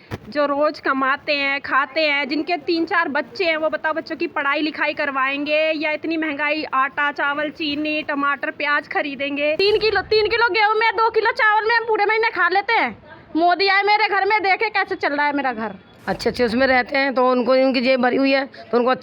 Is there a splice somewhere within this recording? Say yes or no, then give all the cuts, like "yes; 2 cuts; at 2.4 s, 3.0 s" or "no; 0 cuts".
yes; 2 cuts; at 9.6 s, 15.9 s